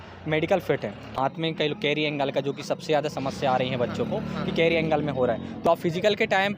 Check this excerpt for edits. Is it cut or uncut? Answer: cut